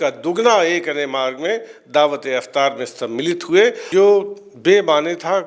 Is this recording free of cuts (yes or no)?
no